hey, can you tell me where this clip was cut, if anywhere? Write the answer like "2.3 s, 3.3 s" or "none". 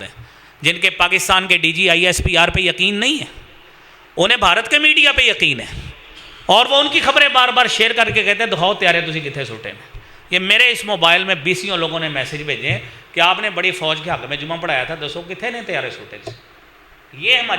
none